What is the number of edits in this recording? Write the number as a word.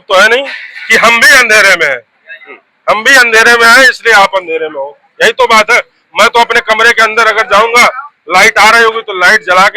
zero